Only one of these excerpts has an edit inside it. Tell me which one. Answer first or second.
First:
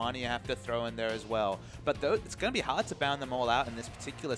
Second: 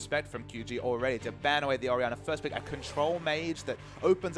first